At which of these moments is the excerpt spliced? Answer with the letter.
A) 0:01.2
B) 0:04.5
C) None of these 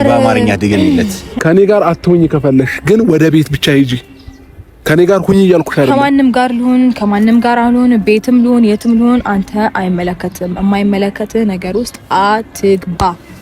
A